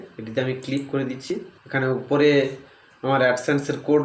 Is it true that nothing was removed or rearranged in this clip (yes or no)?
no